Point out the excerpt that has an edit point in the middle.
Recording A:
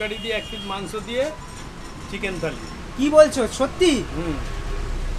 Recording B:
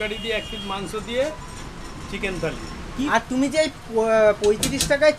B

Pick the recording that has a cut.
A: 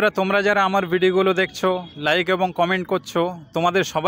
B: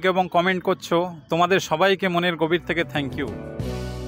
B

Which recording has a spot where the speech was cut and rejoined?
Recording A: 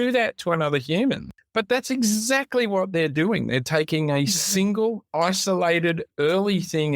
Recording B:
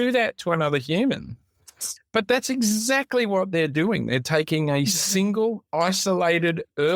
A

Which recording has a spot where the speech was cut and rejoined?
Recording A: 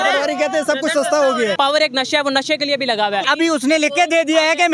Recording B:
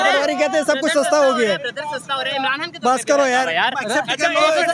A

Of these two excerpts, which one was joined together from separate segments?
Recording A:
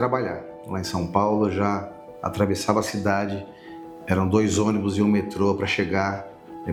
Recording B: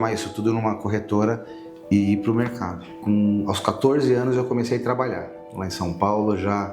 B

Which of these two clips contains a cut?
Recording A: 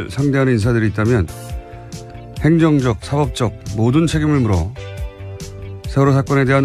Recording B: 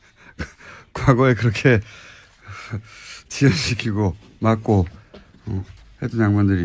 A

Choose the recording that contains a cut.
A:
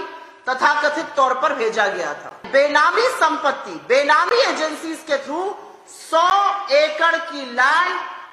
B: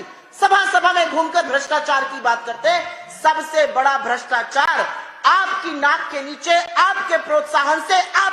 A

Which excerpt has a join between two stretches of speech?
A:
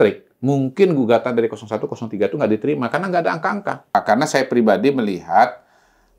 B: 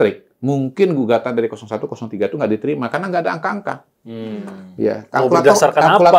A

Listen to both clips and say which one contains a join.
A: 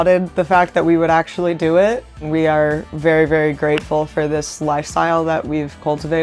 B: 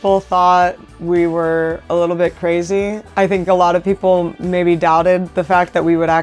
A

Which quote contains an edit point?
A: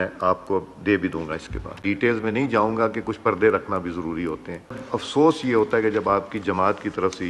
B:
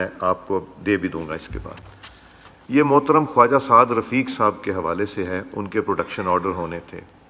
A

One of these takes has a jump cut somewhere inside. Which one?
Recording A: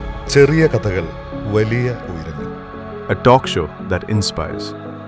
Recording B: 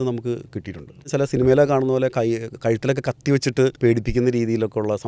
B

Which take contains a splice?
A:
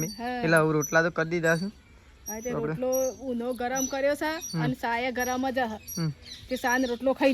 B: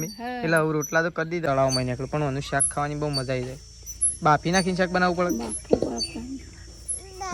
B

